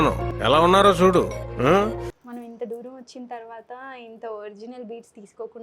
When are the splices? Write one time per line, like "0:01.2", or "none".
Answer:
0:02.2